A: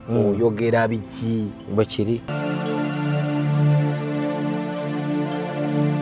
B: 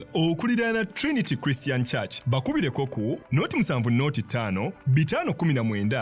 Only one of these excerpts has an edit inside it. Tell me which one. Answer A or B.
A